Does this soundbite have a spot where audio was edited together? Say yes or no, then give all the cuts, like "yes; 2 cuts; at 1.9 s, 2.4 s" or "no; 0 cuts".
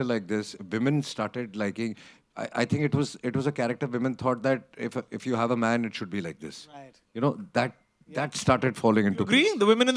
no; 0 cuts